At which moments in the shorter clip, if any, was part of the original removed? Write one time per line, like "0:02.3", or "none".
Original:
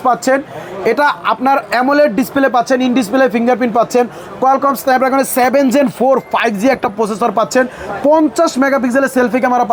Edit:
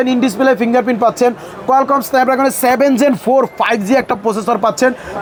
none